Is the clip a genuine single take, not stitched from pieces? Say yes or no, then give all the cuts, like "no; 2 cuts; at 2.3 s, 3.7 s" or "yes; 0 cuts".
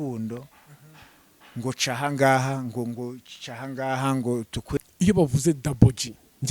no; 1 cut; at 4.8 s